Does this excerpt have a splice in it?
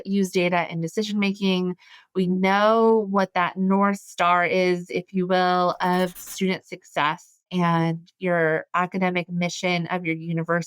yes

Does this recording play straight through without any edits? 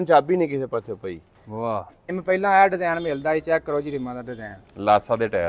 no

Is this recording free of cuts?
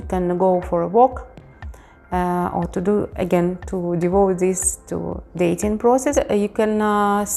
no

